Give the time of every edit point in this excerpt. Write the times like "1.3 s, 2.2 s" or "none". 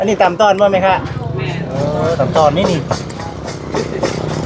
none